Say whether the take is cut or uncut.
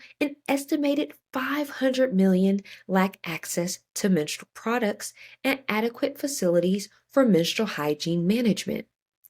uncut